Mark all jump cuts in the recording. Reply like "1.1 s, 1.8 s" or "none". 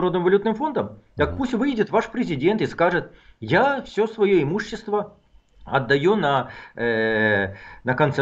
none